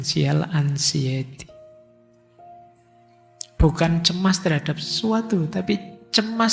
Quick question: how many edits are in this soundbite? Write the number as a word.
zero